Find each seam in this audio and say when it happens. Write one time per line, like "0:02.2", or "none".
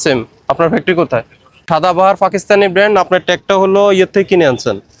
0:01.6